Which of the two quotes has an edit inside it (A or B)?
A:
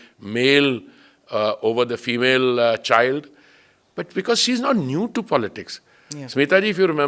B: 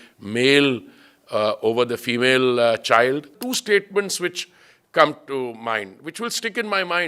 B